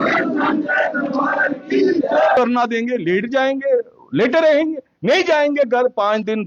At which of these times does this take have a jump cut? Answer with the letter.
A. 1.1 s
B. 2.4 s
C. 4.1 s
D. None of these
B